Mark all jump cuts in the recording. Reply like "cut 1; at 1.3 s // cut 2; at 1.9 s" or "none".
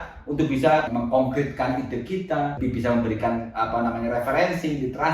cut 1; at 0.9 s // cut 2; at 2.6 s